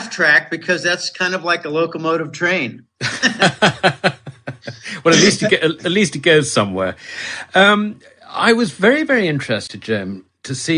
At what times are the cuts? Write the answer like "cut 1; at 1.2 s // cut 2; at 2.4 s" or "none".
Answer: cut 1; at 7.0 s